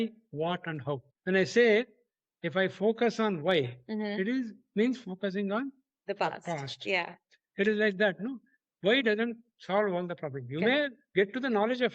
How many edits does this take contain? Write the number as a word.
one